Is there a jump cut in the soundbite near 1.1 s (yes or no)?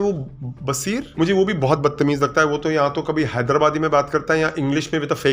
yes